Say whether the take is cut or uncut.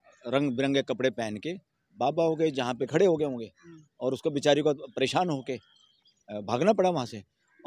cut